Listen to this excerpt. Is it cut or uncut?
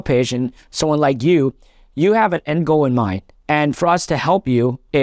uncut